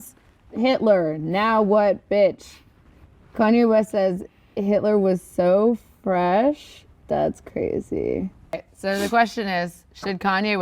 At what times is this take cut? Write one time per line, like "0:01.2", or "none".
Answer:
0:08.7